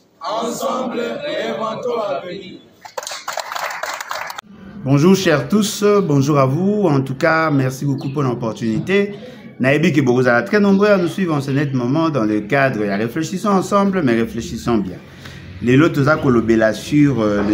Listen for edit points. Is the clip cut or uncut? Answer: cut